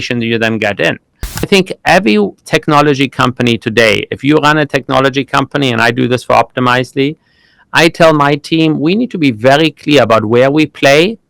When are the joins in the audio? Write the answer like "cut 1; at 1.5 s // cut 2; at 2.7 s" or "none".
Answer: cut 1; at 1.5 s